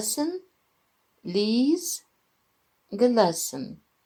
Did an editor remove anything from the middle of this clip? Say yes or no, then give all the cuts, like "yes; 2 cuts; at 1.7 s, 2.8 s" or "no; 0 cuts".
no; 0 cuts